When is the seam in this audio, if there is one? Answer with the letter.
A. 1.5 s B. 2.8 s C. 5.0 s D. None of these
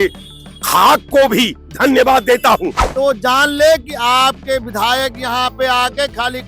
B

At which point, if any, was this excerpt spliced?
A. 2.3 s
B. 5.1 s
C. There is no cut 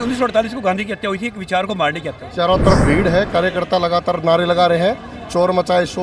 A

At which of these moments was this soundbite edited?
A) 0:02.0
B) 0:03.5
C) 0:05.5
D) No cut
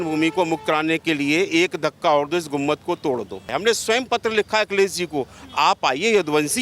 B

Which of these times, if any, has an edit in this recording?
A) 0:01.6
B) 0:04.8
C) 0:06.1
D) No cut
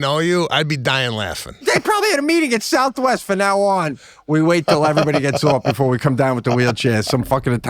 A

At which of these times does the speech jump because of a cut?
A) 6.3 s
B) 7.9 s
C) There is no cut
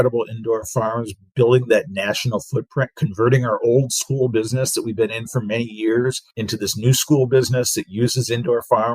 A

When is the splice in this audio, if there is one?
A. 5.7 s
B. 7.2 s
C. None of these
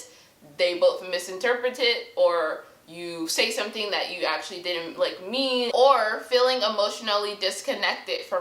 A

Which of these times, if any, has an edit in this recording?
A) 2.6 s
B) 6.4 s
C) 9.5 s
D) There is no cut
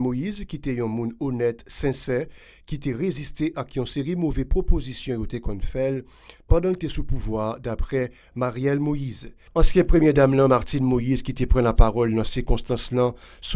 C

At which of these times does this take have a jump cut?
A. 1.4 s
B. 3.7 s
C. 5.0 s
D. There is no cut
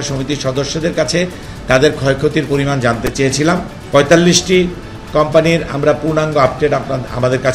B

